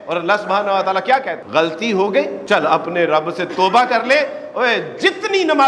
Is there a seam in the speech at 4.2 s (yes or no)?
no